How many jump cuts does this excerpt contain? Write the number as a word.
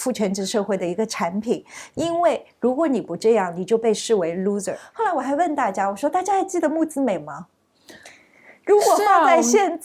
one